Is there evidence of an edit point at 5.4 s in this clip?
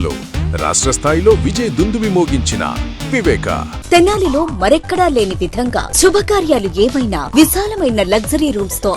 no; 1 cut; at 3.7 s

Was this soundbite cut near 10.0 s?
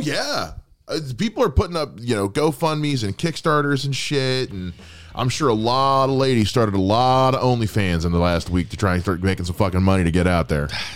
no; 0 cuts

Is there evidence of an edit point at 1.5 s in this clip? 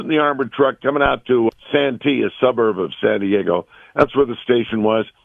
yes; 1 cut; at 1.5 s

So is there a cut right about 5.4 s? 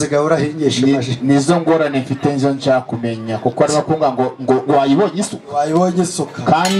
no; 0 cuts

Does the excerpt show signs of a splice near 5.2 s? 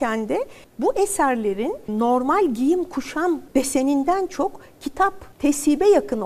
no; 2 cuts; at 1.9 s, 3.4 s

